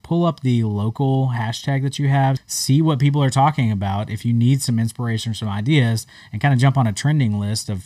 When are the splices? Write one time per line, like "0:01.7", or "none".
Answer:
0:02.4